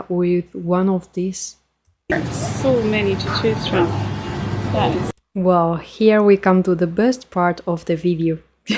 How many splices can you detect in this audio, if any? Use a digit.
1